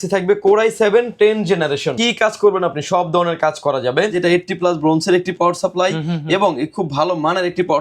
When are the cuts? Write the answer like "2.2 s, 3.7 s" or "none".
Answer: 1.9 s, 4.2 s